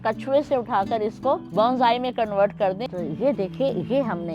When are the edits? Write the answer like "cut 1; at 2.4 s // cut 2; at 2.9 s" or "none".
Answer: cut 1; at 1.5 s // cut 2; at 2.8 s

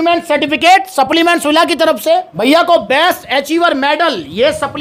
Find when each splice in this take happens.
none

